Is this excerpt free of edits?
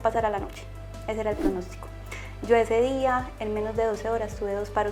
yes; 0 cuts

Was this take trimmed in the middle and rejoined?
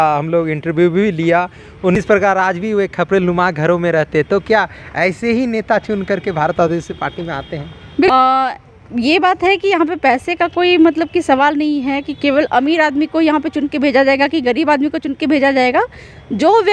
yes; 2 cuts; at 1.9 s, 8.1 s

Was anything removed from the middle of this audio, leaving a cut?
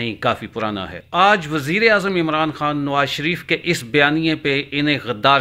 yes; 1 cut; at 1.0 s

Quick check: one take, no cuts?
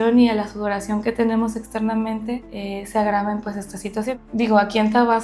no; 2 cuts; at 2.5 s, 4.1 s

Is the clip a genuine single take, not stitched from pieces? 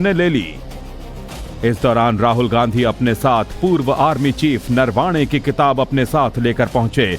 no; 1 cut; at 2.1 s

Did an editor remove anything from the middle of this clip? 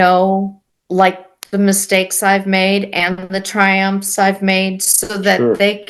no; 0 cuts

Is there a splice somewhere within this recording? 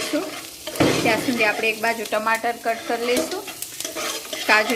no; 0 cuts

